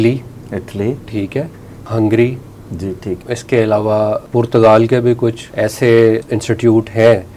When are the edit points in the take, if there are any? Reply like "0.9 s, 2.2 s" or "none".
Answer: 1.9 s, 3.1 s, 4.2 s, 5.4 s, 6.2 s